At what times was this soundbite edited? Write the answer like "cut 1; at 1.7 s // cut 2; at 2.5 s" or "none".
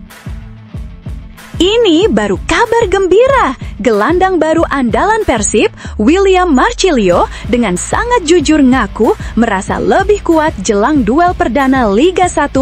cut 1; at 1.6 s